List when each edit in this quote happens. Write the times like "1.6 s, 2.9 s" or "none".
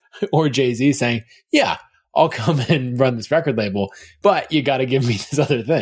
4.0 s